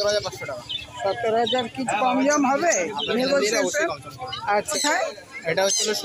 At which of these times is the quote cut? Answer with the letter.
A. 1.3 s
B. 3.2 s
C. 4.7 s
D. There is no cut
C